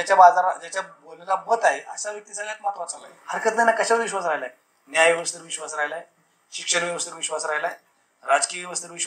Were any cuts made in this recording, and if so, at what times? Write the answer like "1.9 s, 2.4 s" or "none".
3.2 s